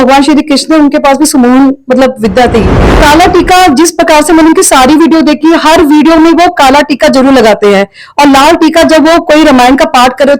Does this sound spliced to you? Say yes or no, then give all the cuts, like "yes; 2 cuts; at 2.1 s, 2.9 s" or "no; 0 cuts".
yes; 1 cut; at 3.0 s